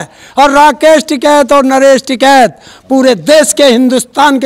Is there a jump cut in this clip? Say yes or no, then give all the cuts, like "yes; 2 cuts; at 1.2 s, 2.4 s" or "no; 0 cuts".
no; 0 cuts